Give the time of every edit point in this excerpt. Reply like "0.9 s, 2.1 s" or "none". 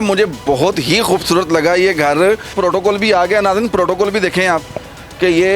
2.6 s